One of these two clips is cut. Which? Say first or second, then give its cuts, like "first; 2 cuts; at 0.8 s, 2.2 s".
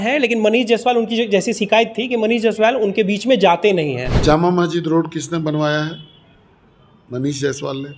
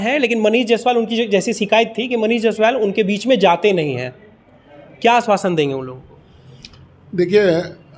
first; 1 cut; at 4.1 s